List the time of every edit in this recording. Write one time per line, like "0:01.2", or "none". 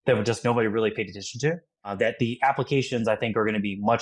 0:01.9